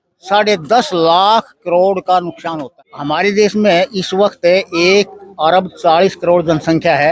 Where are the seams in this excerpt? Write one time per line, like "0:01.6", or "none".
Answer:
0:02.7